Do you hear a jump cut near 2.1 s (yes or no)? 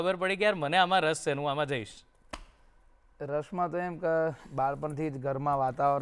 no